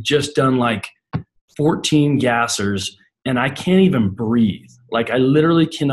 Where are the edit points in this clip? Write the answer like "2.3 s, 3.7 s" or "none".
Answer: none